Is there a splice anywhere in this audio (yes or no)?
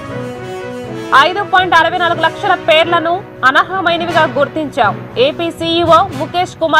no